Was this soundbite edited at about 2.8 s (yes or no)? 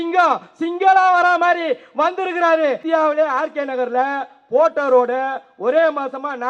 yes